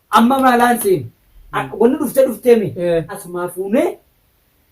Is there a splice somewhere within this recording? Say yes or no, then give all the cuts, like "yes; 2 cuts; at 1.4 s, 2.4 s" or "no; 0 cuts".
yes; 1 cut; at 3.1 s